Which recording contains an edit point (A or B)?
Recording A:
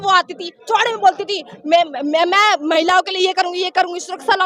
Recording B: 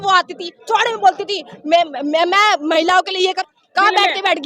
B